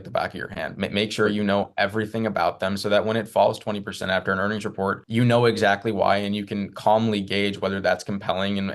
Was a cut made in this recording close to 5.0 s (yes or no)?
yes